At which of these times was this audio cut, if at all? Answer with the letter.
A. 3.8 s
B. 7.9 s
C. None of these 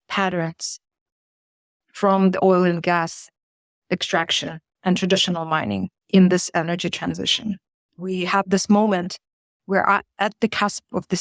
B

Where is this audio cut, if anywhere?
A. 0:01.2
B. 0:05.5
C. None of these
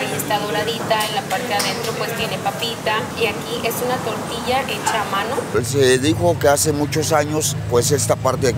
B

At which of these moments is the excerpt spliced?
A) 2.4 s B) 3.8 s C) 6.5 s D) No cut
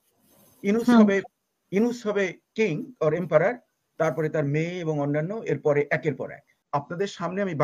C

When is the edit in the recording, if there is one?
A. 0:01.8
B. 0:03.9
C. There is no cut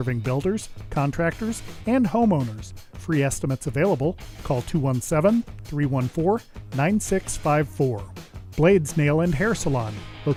C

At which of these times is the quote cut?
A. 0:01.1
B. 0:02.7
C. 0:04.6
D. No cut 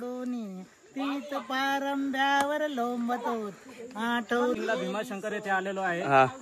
C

